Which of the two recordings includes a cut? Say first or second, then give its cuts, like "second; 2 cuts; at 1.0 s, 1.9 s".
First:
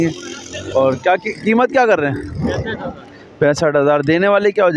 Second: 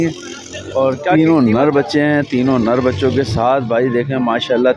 second; 1 cut; at 1.1 s